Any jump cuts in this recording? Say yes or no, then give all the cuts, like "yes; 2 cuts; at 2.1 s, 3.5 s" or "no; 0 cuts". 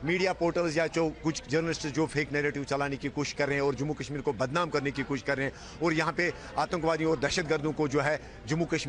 no; 0 cuts